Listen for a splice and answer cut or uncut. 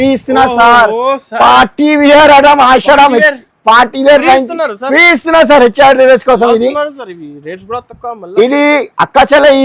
uncut